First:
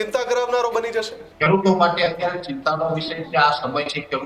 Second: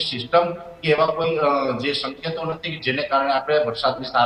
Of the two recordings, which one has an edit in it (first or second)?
first